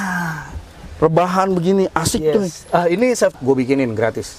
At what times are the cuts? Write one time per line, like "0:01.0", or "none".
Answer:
0:03.4